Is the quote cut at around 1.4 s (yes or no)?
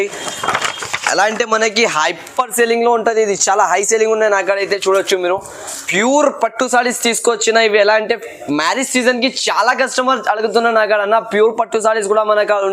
no